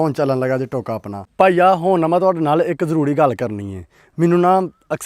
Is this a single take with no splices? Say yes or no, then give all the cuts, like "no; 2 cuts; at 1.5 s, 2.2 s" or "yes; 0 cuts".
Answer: no; 1 cut; at 1.1 s